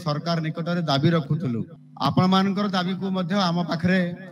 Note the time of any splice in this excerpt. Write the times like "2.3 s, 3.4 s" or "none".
1.8 s